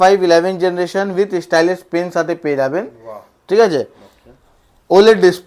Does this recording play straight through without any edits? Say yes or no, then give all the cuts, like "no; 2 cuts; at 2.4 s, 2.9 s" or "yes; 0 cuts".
yes; 0 cuts